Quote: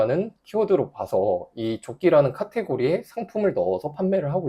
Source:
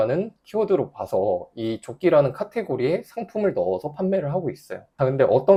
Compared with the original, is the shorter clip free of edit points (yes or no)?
yes